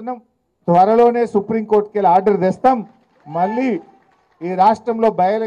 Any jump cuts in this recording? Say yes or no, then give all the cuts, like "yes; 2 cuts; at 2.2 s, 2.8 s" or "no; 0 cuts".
no; 0 cuts